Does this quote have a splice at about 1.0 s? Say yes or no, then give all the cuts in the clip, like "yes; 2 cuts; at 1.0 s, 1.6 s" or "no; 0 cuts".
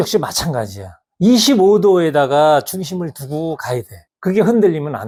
no; 0 cuts